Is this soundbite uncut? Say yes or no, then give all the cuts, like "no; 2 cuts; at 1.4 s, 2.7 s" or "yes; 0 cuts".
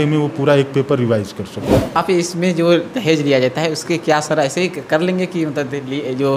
no; 1 cut; at 2.0 s